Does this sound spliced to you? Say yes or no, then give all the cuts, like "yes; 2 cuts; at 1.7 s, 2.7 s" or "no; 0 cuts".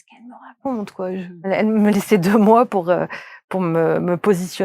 yes; 1 cut; at 1.5 s